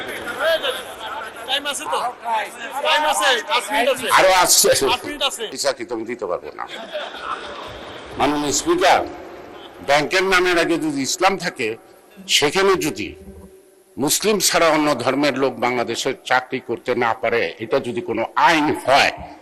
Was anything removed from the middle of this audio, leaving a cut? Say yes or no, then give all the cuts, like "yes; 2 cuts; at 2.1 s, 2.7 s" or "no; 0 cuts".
yes; 1 cut; at 5.5 s